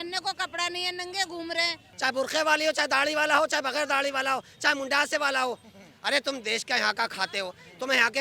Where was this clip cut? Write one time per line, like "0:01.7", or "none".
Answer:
0:01.9